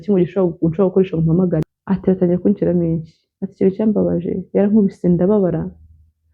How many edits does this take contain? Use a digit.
1